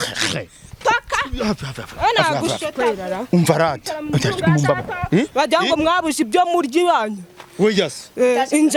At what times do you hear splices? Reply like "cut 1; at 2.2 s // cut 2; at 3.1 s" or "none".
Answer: none